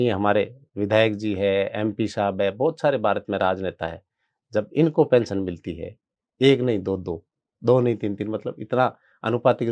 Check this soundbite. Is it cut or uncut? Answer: uncut